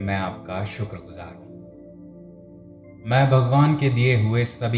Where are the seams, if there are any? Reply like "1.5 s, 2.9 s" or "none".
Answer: 1.4 s, 3.0 s